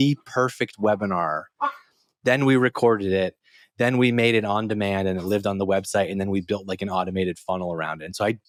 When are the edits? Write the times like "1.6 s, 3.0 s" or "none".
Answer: none